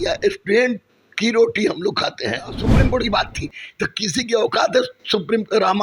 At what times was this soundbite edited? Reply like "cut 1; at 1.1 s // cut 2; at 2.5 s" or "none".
cut 1; at 2.7 s